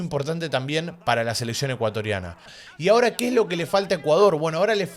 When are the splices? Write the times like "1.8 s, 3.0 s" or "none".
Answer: 2.5 s

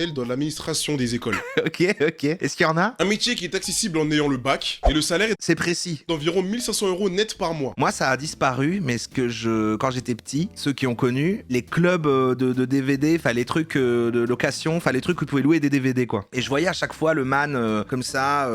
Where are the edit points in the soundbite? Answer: 7.7 s, 10.5 s, 11.5 s

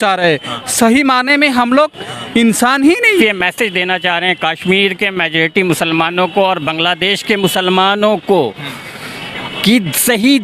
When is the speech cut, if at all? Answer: 3.2 s

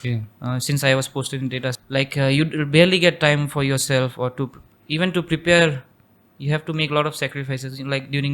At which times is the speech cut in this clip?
1.7 s

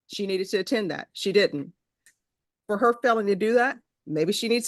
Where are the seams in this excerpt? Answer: 2.1 s

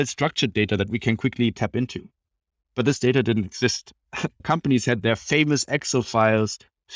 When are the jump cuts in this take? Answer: 4.4 s

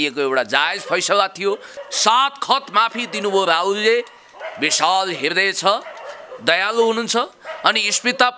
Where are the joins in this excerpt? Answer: 1.7 s

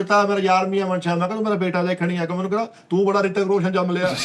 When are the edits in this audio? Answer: none

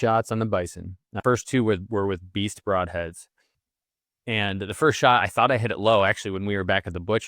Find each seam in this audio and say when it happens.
1.0 s

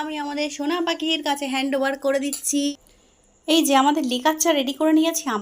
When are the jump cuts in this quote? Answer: 2.7 s

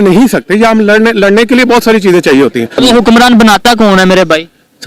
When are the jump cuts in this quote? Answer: 2.8 s

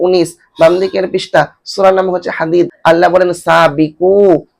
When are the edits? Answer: 2.7 s

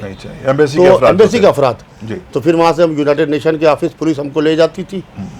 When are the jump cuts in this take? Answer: none

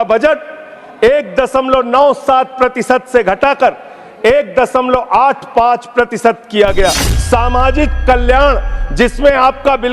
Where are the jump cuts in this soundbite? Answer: 7.1 s

